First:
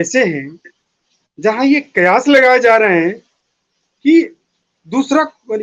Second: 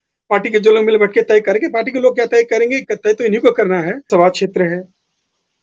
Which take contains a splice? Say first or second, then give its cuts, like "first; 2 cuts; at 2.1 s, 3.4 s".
second; 1 cut; at 4.1 s